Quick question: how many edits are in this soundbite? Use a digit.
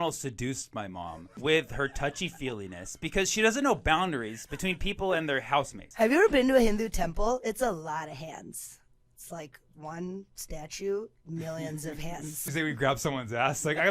3